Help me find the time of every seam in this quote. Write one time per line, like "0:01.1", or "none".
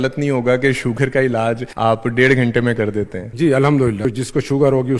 0:01.7
0:03.2
0:04.1

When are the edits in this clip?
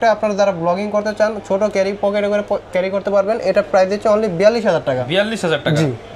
none

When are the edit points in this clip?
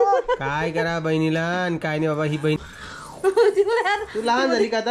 0:02.6

